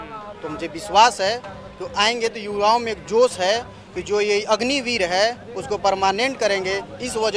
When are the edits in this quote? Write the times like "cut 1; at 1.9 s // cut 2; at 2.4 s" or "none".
none